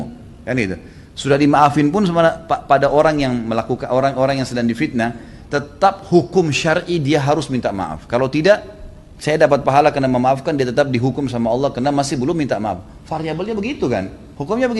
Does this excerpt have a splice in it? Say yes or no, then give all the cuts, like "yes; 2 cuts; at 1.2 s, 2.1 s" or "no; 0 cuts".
no; 0 cuts